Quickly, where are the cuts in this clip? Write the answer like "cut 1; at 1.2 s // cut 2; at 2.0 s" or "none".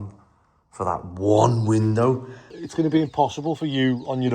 cut 1; at 2.6 s